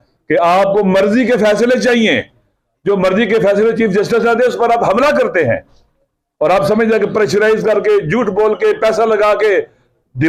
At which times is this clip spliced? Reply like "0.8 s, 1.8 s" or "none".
none

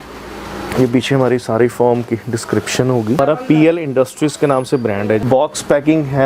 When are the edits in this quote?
3.2 s, 5.2 s

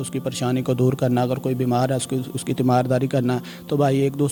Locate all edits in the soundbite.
none

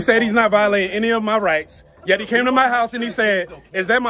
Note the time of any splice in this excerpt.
none

